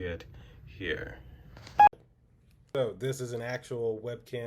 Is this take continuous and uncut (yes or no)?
no